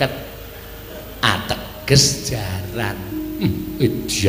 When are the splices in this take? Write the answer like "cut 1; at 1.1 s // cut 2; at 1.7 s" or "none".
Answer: none